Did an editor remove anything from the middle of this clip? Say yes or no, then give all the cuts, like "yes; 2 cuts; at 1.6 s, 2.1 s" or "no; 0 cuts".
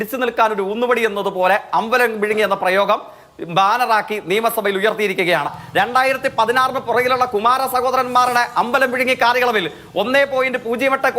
yes; 1 cut; at 5.6 s